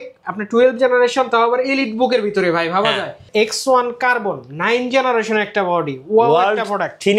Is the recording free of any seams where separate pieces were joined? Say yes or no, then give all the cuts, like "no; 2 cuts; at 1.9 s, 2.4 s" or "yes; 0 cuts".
no; 1 cut; at 3.2 s